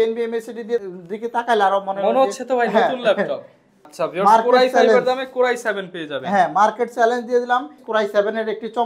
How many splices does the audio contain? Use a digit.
3